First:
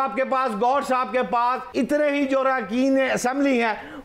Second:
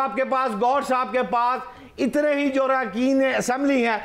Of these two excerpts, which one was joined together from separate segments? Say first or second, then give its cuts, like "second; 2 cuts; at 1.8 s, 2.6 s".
first; 1 cut; at 1.6 s